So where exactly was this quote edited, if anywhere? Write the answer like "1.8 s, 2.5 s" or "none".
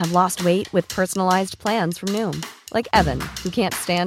none